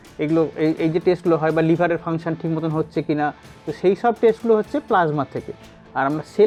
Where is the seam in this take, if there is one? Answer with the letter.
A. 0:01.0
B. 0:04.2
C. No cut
C